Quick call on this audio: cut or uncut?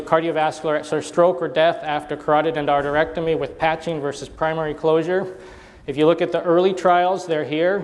cut